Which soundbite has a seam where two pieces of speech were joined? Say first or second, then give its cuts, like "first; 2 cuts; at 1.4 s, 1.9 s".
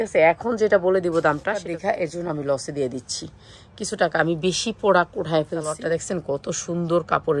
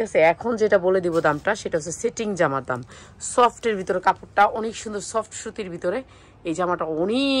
first; 2 cuts; at 1.6 s, 5.8 s